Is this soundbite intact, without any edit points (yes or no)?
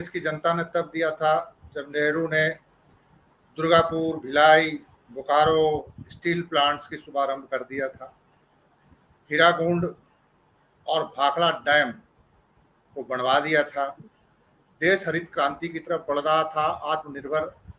yes